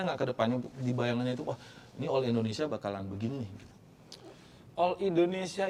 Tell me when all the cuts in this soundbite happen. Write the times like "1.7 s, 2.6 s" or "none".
none

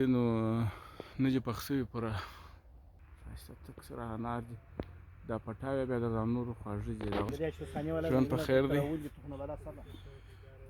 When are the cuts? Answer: 2.8 s, 7.3 s

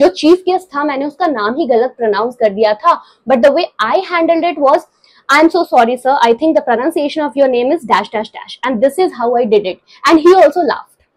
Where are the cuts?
none

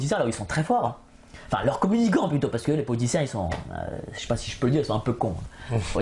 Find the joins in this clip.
none

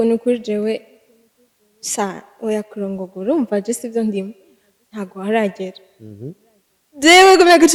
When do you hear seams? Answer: none

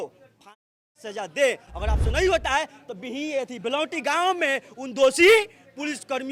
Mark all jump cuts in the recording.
none

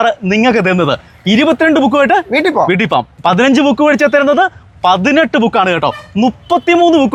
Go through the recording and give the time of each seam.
none

